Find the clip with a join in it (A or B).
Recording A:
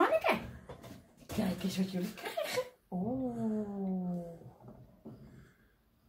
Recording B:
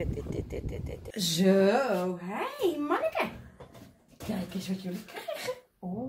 B